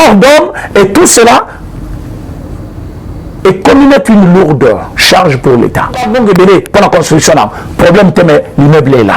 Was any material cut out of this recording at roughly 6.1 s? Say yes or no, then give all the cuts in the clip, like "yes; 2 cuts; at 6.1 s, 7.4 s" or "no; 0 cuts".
yes; 1 cut; at 6.1 s